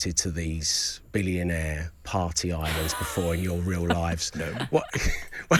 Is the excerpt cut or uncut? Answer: uncut